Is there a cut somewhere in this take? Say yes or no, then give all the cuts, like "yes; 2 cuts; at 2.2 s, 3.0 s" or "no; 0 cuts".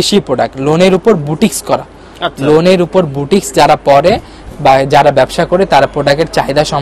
no; 0 cuts